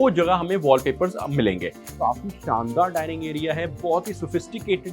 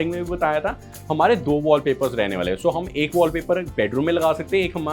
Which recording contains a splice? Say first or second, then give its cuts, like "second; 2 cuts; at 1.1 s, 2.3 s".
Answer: first; 1 cut; at 1.9 s